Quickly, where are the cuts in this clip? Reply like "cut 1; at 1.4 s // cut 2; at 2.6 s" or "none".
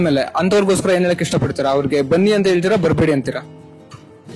none